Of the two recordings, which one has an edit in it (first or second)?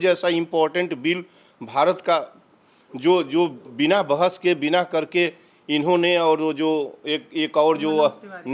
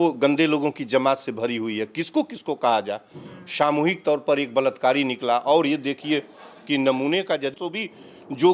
second